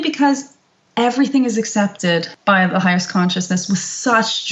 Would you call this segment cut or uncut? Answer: cut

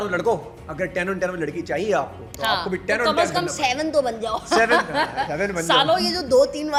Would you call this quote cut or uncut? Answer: uncut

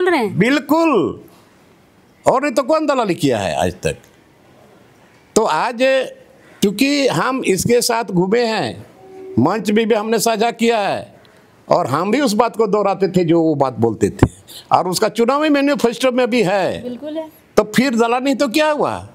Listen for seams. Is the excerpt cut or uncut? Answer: uncut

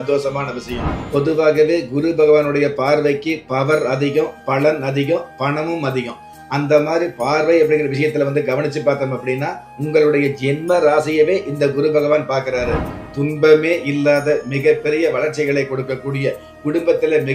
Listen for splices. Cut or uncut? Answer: cut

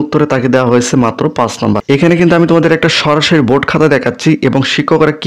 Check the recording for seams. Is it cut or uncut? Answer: cut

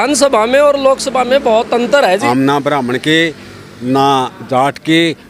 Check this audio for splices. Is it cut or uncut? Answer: cut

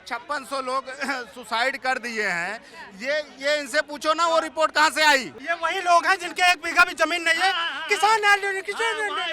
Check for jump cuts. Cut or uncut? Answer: cut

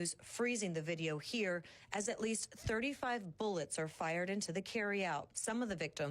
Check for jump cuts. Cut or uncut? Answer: uncut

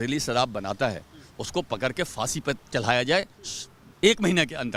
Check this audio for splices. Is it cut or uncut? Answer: uncut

